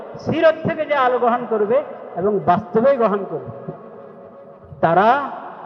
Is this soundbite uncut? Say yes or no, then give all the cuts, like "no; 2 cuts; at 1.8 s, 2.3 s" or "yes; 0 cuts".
yes; 0 cuts